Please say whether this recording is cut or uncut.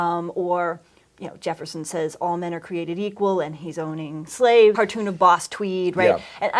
uncut